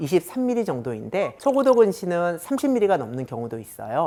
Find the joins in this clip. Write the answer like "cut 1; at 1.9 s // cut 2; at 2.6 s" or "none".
none